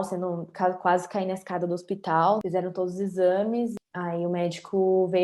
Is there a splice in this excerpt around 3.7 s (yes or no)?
yes